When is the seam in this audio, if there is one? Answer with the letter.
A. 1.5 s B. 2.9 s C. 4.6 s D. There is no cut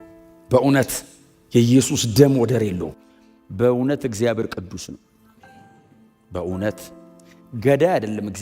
B